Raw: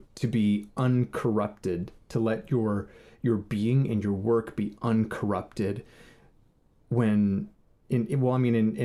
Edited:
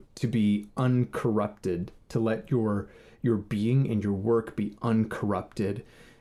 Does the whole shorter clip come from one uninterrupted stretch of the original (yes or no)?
yes